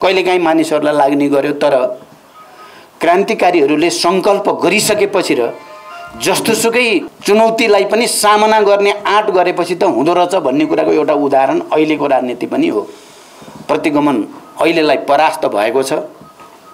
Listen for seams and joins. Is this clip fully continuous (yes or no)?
no